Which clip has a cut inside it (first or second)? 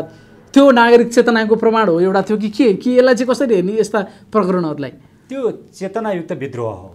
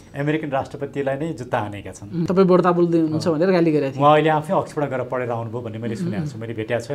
second